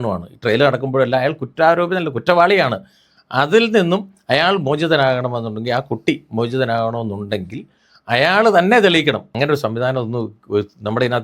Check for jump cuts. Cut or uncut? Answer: cut